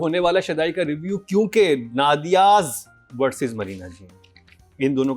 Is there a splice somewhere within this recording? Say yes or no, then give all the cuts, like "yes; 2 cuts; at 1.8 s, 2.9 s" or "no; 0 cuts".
no; 0 cuts